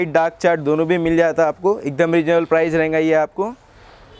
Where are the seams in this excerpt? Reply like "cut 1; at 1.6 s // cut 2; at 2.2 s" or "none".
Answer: none